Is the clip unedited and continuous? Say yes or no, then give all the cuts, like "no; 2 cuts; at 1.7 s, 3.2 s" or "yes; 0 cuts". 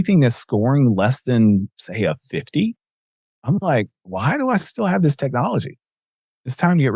yes; 0 cuts